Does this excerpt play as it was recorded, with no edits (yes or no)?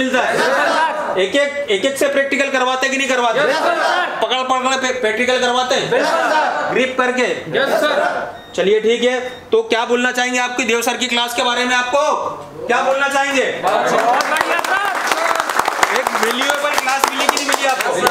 yes